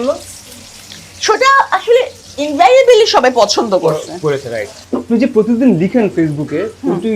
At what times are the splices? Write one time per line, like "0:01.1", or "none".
0:04.7

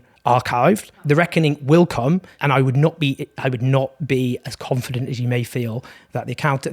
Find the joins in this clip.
0:00.9
0:02.3

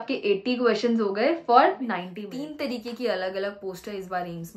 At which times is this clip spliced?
0:02.1

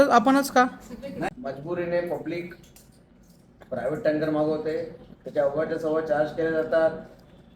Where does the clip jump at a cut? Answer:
0:01.3

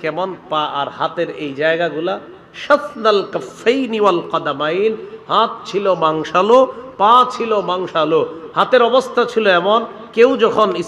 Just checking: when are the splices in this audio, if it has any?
none

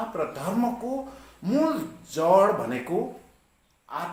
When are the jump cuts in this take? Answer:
none

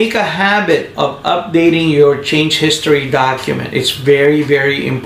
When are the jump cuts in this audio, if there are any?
none

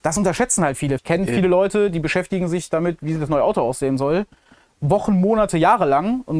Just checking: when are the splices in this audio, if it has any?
0:01.0

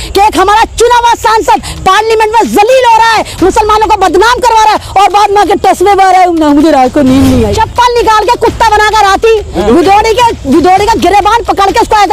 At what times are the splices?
0:07.6

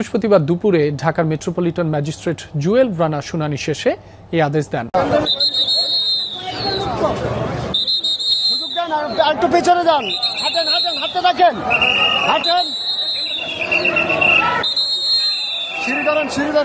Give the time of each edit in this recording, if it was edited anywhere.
0:04.9

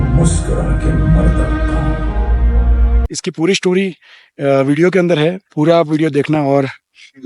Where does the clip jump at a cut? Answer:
0:03.0

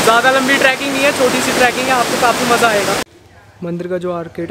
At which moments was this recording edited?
0:03.0

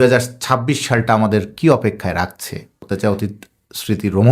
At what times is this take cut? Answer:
0:02.8

